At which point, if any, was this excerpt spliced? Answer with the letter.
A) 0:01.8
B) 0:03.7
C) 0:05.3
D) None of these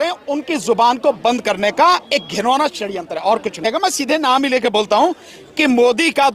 B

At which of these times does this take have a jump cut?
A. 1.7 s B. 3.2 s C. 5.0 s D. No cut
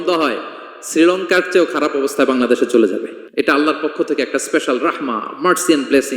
B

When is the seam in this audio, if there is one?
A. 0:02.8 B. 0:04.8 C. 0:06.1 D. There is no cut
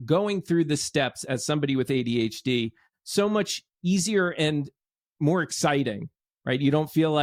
D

